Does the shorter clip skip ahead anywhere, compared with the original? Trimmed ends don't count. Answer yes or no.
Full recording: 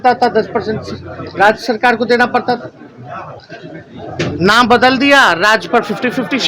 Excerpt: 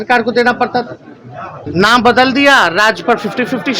yes